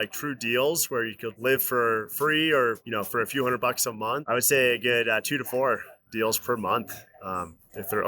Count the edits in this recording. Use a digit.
3